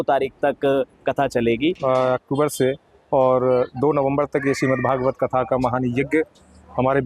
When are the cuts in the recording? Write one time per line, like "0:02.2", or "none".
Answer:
0:01.8